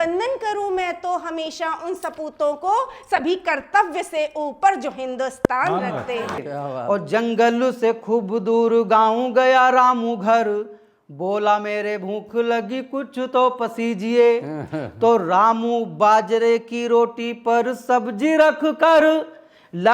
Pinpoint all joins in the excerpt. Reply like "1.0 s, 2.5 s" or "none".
6.4 s

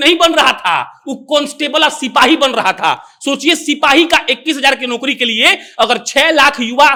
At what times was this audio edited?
none

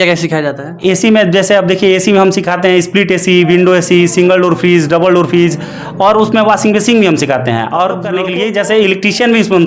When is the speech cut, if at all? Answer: 8.1 s

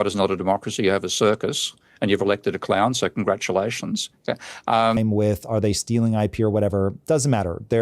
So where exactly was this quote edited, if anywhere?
5.0 s

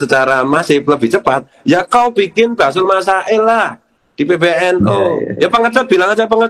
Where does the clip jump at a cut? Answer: 5.2 s

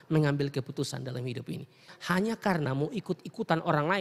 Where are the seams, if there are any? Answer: 1.9 s

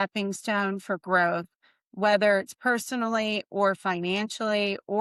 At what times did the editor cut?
none

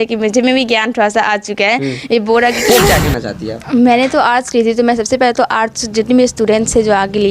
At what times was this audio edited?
2.6 s

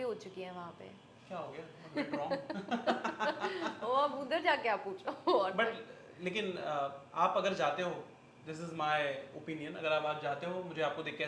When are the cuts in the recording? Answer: none

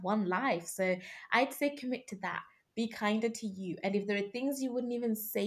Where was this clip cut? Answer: none

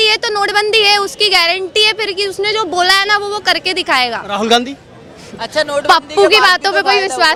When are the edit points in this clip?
none

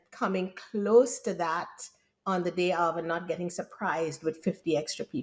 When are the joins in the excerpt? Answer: none

